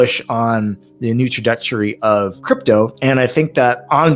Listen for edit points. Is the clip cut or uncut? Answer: cut